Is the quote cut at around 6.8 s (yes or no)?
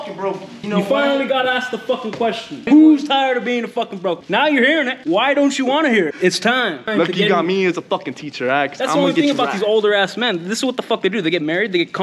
yes